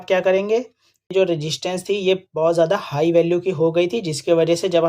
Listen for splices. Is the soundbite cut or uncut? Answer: cut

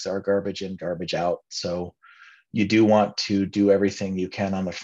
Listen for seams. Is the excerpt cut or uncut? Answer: uncut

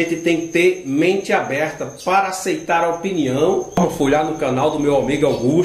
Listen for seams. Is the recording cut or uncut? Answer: cut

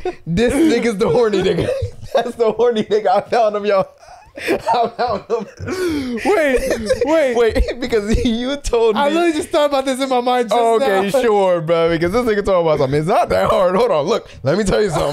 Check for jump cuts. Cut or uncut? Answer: uncut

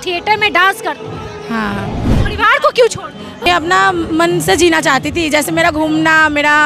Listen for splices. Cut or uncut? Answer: cut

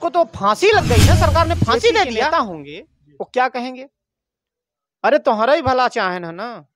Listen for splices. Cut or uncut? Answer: cut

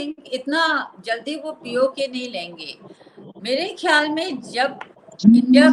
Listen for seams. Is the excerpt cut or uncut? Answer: uncut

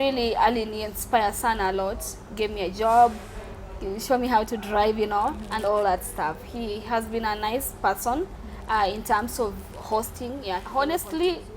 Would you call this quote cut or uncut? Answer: cut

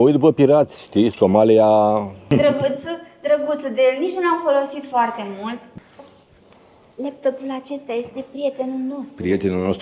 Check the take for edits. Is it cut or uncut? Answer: cut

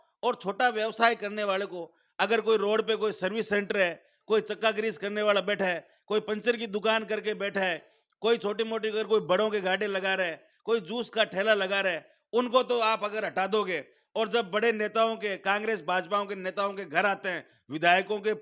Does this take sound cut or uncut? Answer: uncut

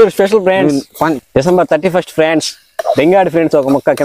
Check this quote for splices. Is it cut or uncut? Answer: cut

